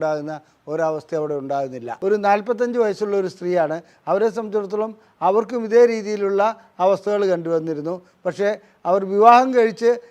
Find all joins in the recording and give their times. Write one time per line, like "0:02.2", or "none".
0:01.9